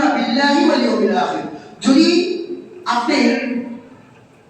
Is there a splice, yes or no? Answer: no